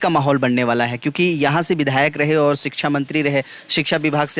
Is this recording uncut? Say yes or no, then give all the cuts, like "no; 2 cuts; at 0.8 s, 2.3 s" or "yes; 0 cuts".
yes; 0 cuts